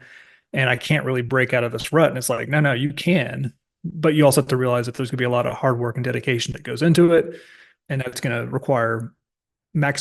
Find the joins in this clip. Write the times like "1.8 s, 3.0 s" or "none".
none